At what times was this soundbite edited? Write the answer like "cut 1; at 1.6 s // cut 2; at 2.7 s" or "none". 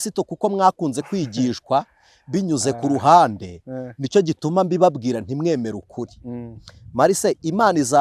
none